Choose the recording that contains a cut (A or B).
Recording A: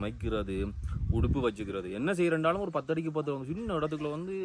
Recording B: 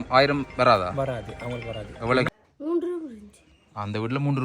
B